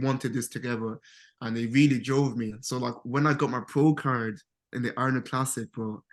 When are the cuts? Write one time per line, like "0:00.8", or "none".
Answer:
none